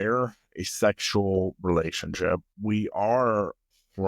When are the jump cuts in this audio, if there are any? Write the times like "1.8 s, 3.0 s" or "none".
2.5 s